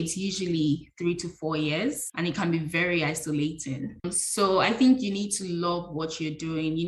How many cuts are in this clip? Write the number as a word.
zero